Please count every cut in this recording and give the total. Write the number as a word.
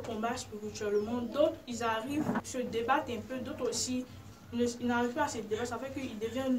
one